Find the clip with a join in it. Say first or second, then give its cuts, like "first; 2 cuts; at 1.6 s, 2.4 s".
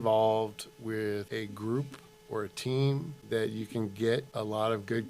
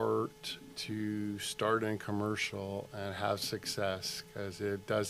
first; 3 cuts; at 1.3 s, 3.1 s, 4.3 s